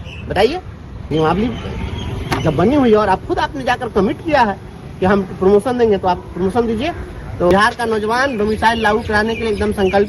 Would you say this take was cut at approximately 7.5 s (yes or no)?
yes